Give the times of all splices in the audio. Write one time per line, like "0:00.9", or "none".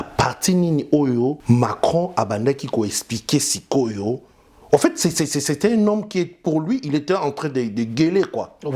0:01.4